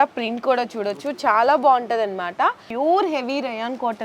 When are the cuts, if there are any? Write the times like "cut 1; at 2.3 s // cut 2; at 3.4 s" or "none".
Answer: cut 1; at 2.7 s

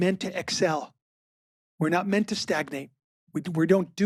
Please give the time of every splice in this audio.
none

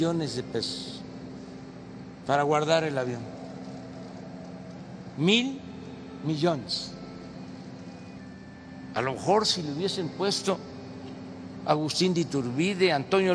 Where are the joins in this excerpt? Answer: cut 1; at 8.4 s

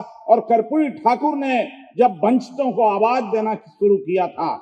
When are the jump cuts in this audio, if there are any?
none

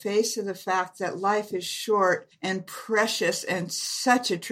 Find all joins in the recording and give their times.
cut 1; at 2.3 s

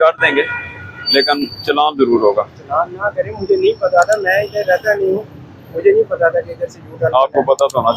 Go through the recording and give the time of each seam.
none

